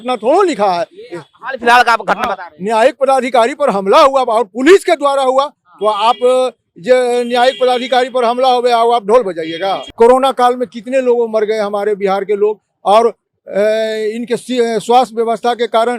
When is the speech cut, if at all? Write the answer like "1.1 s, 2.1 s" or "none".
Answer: 9.8 s